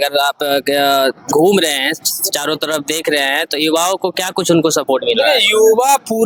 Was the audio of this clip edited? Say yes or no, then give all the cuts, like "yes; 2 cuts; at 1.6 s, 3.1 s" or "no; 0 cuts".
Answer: no; 0 cuts